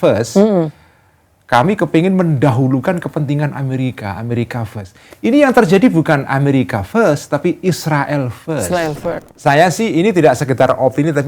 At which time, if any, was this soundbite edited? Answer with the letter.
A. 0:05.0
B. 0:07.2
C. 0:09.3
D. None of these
C